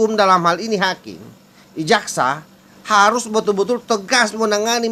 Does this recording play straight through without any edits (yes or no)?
yes